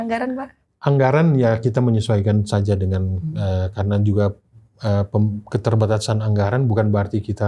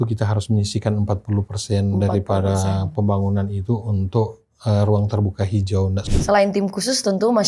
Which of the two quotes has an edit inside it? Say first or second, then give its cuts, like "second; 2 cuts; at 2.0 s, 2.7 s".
second; 1 cut; at 6.0 s